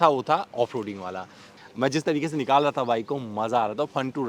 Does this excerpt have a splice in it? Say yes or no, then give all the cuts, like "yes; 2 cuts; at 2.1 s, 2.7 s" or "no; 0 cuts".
yes; 1 cut; at 1.5 s